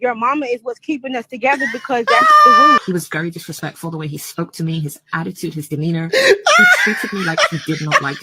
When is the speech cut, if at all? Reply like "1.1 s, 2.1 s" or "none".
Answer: 2.8 s